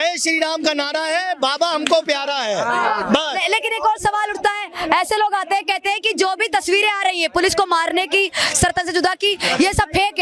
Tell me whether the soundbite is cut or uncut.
uncut